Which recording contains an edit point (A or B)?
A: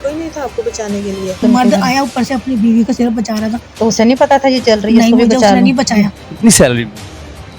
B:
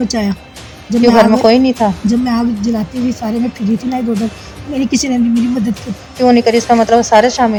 A